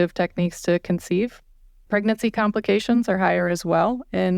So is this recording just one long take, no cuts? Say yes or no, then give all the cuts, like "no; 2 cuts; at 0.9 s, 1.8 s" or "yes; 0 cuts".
yes; 0 cuts